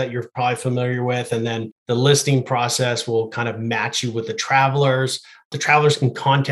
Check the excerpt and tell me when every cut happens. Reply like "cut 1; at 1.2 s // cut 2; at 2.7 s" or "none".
cut 1; at 1.7 s // cut 2; at 5.5 s

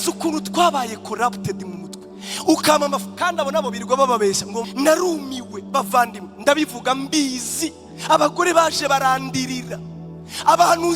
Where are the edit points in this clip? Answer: cut 1; at 4.6 s

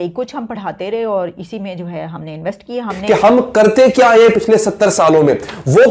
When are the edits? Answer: cut 1; at 2.9 s

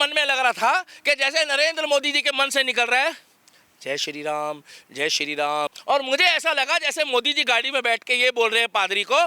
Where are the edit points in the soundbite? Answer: cut 1; at 5.8 s

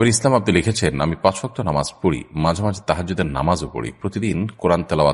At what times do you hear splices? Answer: none

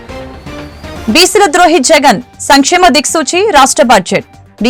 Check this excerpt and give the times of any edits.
none

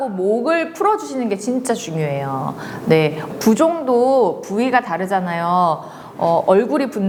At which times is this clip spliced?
none

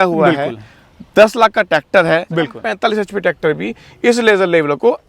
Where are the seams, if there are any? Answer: cut 1; at 2.6 s

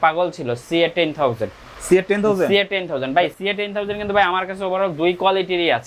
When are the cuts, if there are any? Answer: cut 1; at 3.3 s

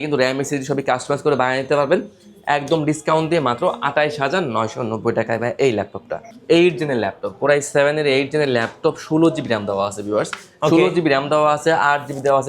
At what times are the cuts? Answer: cut 1; at 6.2 s

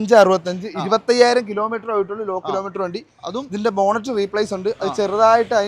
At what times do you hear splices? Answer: none

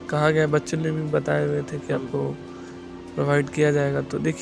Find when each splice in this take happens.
none

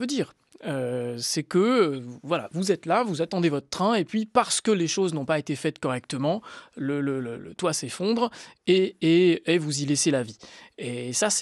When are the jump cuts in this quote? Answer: none

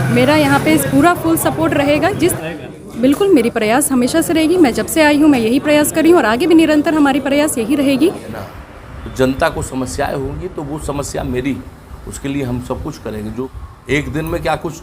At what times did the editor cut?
cut 1; at 2.3 s // cut 2; at 8.3 s // cut 3; at 13.5 s

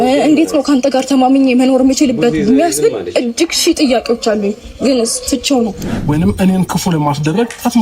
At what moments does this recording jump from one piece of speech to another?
cut 1; at 5.9 s

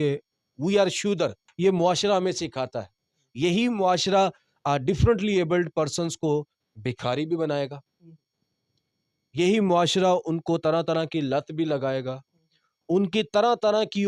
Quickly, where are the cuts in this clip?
cut 1; at 1.4 s

